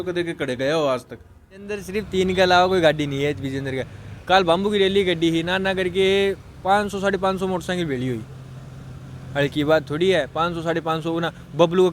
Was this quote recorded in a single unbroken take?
no; 1 cut; at 1.9 s

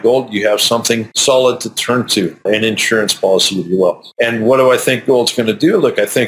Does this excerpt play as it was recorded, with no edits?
no; 3 cuts; at 1.1 s, 2.4 s, 4.1 s

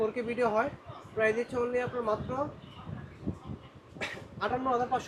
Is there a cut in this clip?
no; 0 cuts

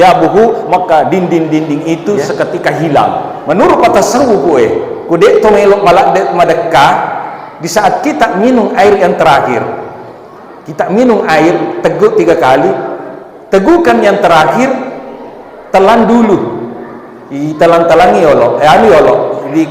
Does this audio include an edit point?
yes; 1 cut; at 3.3 s

